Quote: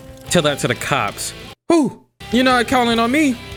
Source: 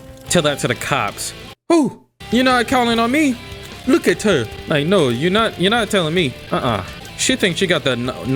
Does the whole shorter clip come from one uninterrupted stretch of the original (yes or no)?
yes